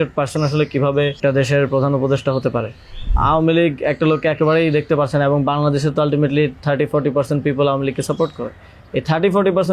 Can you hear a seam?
yes; 2 cuts; at 1.2 s, 3.1 s

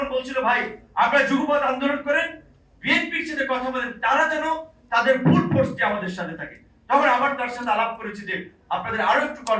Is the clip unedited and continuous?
yes; 0 cuts

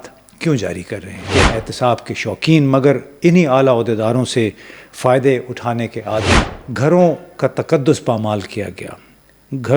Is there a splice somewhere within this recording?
yes; 2 cuts; at 1.1 s, 6.4 s

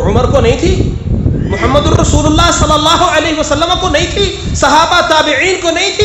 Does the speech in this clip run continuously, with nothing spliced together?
yes; 0 cuts

